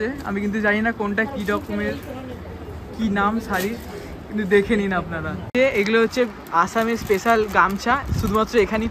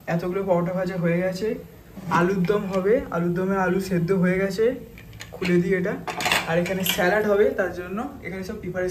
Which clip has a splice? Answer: first; 1 cut; at 5.3 s

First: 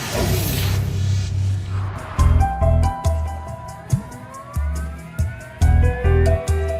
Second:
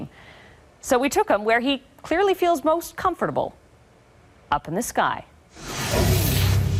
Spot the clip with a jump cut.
first; 1 cut; at 2.7 s

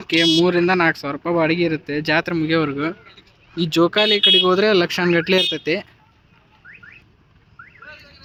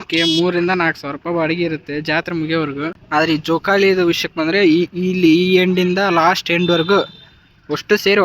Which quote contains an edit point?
second; 1 cut; at 3.0 s

